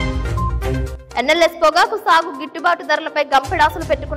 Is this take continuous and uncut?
yes; 0 cuts

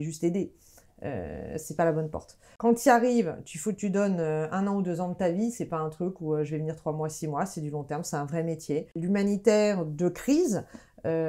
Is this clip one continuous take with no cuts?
no; 2 cuts; at 2.4 s, 9.0 s

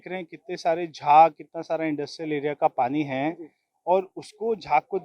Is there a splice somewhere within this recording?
no; 0 cuts

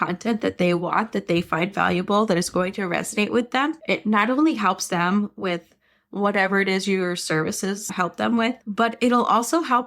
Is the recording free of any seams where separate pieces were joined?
no; 1 cut; at 3.8 s

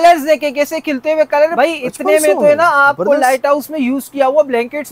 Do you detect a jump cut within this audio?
yes; 1 cut; at 1.5 s

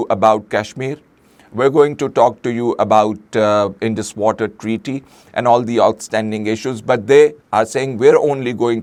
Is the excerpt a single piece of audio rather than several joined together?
yes; 0 cuts

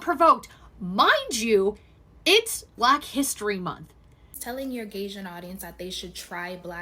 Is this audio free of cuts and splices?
no; 2 cuts; at 2.7 s, 4.5 s

